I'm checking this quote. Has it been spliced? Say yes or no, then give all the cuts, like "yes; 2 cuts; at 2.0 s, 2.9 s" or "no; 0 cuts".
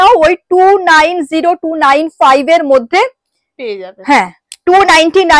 no; 0 cuts